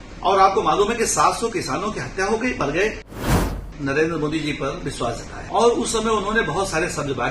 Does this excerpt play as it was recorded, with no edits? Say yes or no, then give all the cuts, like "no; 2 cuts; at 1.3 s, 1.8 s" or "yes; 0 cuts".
no; 2 cuts; at 3.2 s, 5.3 s